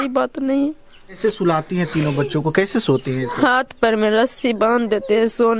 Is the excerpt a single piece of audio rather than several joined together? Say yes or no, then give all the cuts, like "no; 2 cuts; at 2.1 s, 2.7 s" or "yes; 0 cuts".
no; 1 cut; at 1.2 s